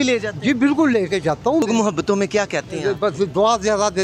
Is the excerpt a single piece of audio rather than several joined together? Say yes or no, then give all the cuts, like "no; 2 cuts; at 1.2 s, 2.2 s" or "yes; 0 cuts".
no; 1 cut; at 1.6 s